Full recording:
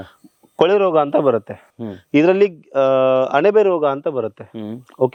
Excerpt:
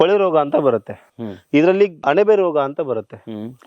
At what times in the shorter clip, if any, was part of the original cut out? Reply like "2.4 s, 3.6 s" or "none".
2.0 s